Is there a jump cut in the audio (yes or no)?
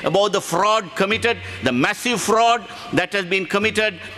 no